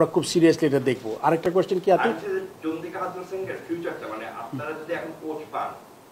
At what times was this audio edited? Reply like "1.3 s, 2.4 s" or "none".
none